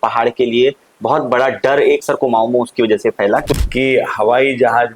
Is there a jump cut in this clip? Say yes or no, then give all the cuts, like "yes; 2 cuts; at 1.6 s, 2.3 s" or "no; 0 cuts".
yes; 1 cut; at 3.5 s